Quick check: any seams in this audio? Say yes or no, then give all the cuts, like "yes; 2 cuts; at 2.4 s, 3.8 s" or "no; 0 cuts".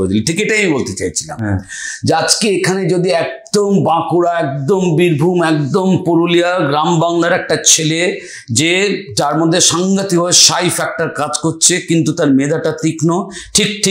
no; 0 cuts